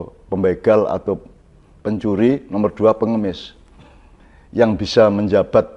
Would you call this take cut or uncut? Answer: uncut